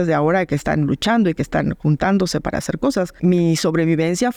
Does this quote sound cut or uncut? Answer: uncut